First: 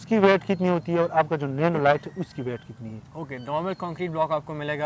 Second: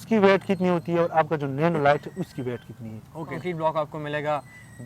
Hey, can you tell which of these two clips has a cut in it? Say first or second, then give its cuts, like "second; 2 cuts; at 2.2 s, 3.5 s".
second; 1 cut; at 3.4 s